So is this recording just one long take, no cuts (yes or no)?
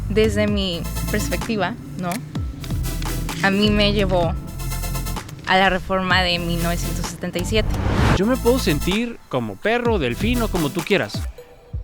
no